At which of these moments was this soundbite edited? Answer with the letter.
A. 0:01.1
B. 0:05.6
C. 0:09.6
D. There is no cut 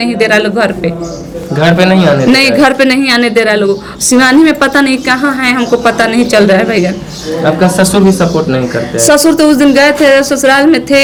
D